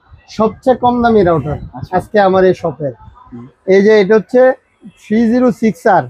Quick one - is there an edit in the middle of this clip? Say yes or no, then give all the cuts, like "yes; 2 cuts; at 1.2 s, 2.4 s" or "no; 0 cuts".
no; 0 cuts